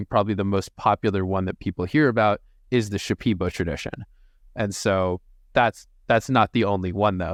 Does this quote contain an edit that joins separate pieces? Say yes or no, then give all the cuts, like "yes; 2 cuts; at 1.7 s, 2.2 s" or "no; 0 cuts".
no; 0 cuts